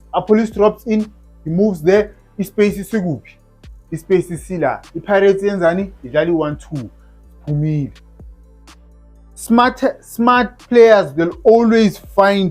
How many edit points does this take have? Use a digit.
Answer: 0